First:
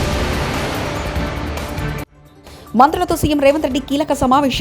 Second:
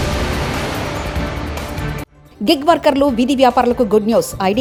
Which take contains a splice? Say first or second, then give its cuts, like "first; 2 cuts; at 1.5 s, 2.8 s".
first; 1 cut; at 2.2 s